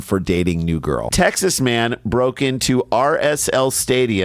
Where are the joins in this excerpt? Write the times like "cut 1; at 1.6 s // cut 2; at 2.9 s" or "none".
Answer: cut 1; at 1.1 s